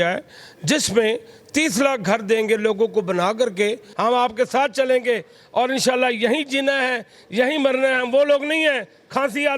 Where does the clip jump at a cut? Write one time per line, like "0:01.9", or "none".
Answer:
0:03.9